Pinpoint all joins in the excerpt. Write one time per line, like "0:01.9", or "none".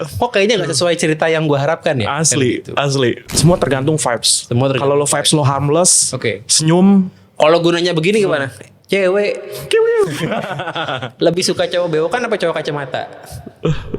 0:03.3